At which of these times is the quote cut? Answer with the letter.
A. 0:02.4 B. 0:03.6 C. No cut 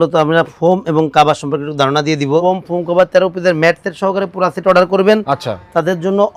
A